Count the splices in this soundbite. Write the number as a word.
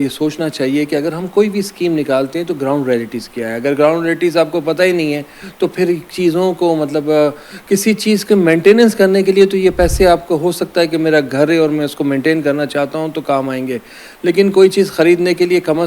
zero